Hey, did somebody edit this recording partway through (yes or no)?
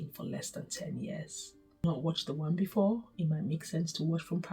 yes